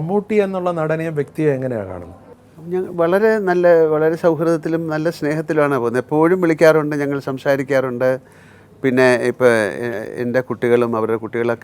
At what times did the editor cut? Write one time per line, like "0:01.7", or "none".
none